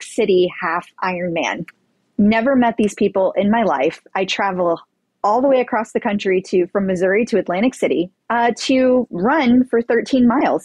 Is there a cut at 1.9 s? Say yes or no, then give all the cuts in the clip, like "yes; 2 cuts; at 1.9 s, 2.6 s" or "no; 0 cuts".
no; 1 cut; at 8.2 s